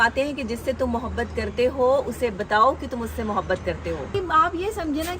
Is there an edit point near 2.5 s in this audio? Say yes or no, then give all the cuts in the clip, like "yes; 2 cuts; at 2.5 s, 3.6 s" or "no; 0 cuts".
no; 1 cut; at 4.1 s